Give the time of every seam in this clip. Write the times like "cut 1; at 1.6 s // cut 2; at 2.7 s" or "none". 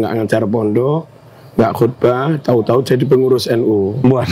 none